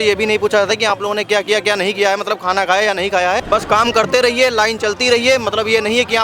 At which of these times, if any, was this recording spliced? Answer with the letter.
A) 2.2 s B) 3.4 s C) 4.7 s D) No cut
B